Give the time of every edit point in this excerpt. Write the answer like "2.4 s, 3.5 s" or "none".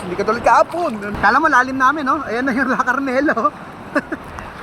1.1 s